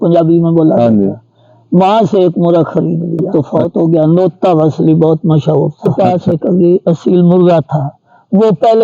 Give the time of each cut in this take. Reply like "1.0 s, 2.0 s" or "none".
3.3 s, 5.9 s

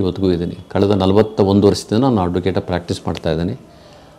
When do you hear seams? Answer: none

